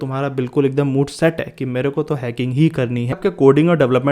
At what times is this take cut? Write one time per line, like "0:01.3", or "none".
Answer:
0:03.2

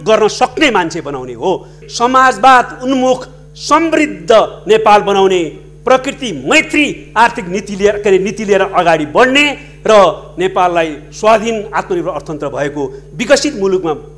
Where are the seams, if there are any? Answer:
0:01.8

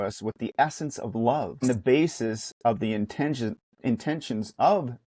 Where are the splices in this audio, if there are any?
0:01.6

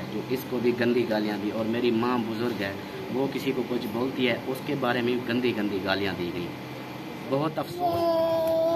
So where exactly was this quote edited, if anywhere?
0:07.7

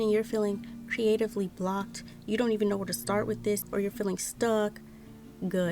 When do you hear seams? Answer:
0:03.6

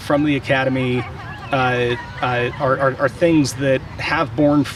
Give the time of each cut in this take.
none

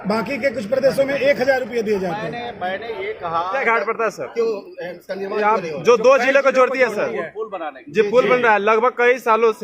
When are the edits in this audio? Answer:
0:03.6

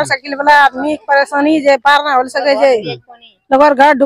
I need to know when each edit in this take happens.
none

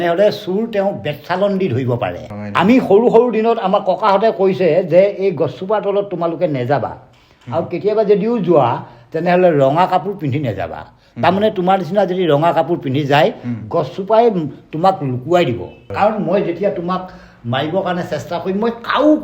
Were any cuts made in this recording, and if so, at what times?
0:02.3
0:15.8

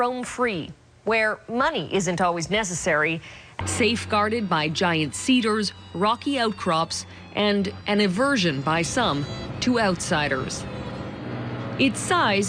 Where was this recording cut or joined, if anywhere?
none

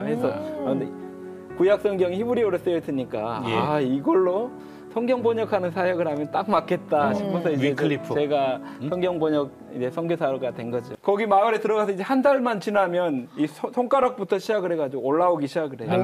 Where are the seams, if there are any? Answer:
0:10.9

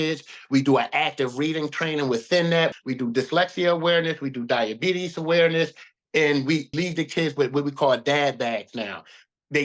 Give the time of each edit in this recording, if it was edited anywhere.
0:02.8
0:06.7

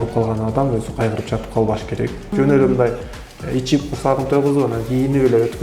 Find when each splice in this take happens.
0:02.3

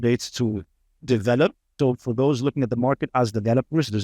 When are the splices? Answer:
0:01.7

